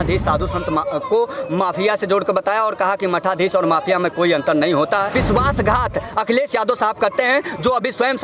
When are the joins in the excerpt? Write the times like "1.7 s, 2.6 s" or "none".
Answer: 5.1 s